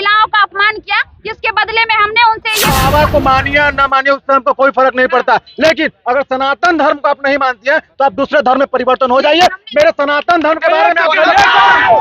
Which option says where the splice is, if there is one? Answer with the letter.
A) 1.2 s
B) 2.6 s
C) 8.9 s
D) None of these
B